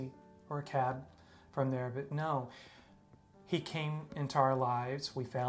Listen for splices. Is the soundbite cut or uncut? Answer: cut